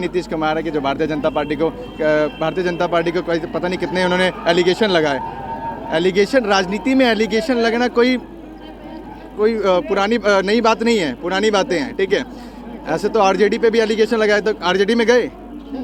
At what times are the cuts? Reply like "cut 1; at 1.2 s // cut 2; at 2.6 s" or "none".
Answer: none

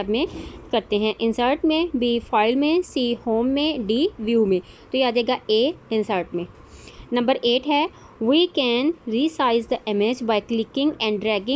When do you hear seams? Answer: cut 1; at 9.8 s

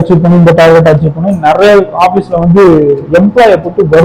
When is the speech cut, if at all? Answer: none

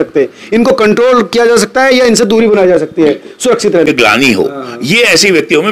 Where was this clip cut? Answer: cut 1; at 3.9 s

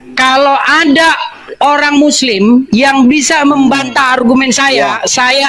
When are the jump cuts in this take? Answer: none

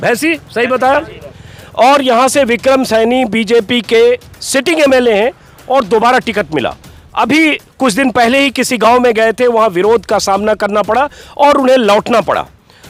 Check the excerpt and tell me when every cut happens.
none

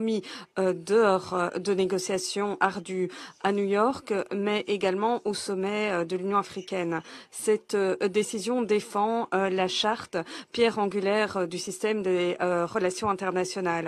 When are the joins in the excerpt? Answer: none

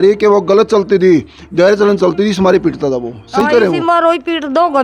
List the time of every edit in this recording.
none

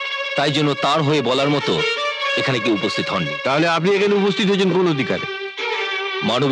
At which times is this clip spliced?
none

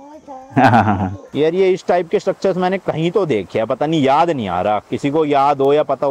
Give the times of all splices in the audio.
cut 1; at 1.3 s

